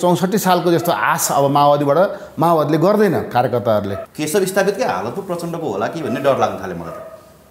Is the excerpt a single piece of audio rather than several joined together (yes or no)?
no